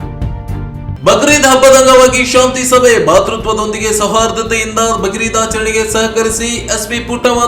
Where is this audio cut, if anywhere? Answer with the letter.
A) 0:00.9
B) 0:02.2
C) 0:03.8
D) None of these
A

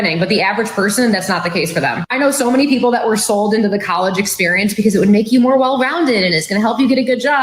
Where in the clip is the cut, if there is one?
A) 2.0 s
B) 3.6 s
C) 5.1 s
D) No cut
D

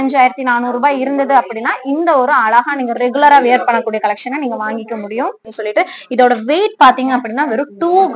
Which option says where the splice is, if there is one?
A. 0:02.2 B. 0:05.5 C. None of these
B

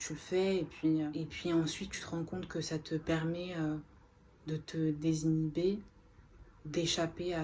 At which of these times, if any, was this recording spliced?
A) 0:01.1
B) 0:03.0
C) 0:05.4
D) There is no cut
A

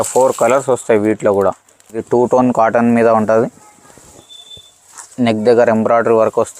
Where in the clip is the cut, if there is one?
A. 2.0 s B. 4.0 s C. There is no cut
A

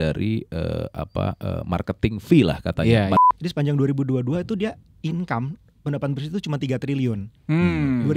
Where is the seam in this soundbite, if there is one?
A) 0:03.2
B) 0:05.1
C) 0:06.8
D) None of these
A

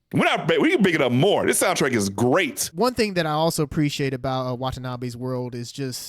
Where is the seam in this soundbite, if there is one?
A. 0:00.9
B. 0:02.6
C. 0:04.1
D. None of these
B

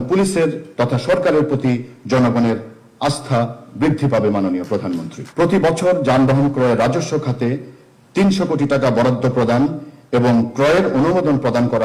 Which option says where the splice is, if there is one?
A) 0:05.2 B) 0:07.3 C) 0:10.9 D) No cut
A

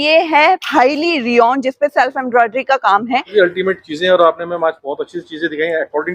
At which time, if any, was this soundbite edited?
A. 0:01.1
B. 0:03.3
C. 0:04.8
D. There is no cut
B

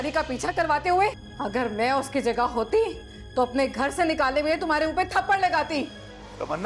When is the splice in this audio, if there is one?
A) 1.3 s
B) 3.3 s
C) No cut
A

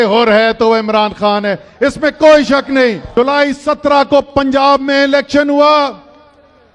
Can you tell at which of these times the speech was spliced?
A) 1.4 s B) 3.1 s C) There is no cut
B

